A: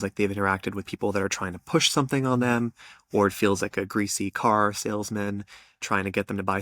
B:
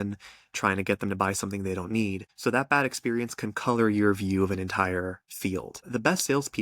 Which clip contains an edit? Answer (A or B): B